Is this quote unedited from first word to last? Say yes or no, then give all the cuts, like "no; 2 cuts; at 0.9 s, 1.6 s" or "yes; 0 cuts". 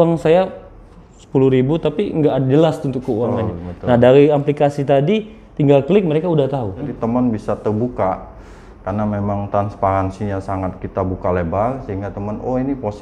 no; 1 cut; at 6.9 s